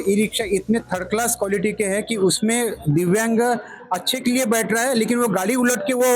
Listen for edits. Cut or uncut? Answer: uncut